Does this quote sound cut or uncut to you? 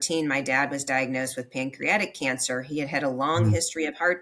uncut